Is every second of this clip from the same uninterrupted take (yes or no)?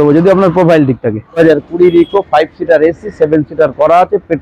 no